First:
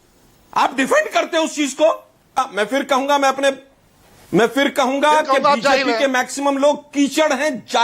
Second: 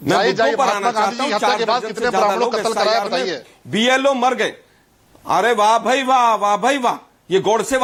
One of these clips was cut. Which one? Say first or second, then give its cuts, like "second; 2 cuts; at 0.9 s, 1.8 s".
first; 1 cut; at 2.4 s